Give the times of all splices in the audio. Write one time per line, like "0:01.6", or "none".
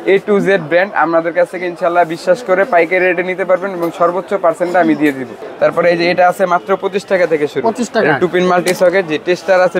0:05.4